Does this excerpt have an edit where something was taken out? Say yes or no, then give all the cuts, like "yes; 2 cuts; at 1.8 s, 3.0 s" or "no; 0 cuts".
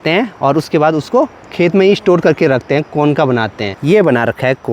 yes; 1 cut; at 3.7 s